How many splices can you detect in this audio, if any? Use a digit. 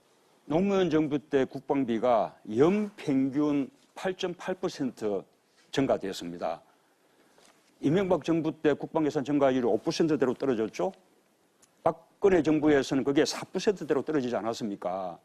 1